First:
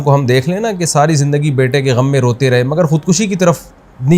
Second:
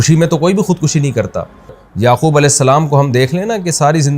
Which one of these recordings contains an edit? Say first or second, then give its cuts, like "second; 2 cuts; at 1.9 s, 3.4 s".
second; 1 cut; at 1.8 s